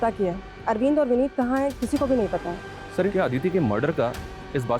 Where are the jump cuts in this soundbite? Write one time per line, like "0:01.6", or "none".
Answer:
0:03.1